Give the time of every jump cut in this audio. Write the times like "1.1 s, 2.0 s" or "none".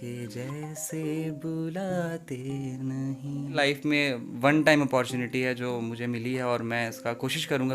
3.5 s